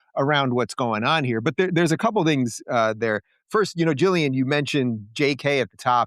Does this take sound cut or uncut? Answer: uncut